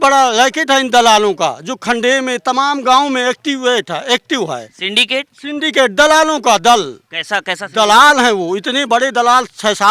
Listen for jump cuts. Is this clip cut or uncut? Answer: uncut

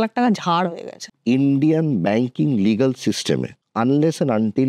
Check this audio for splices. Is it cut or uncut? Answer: cut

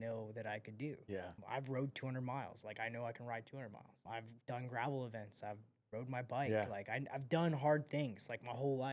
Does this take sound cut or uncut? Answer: cut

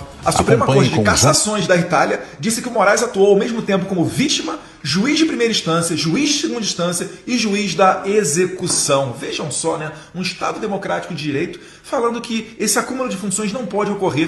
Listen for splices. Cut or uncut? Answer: uncut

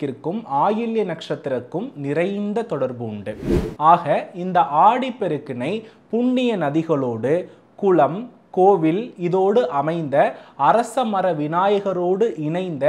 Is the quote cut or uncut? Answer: uncut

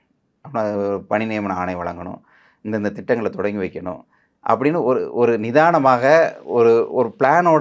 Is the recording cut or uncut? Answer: uncut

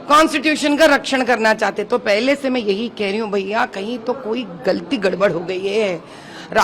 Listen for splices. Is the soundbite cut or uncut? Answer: uncut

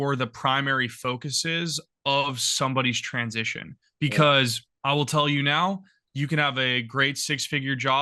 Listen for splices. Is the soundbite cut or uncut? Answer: cut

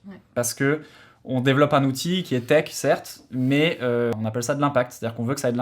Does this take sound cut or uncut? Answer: cut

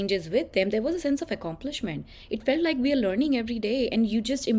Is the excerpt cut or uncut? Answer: uncut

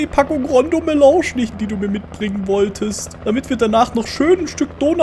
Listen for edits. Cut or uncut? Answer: cut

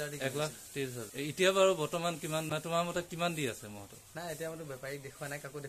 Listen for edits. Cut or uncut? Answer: cut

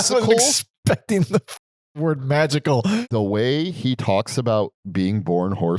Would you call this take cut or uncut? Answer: cut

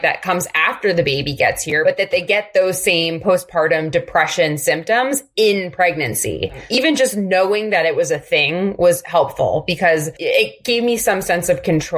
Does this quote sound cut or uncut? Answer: cut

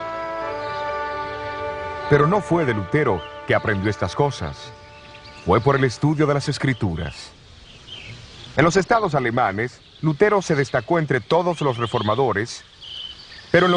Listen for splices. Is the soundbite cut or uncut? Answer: cut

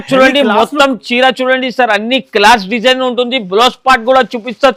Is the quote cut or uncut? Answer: uncut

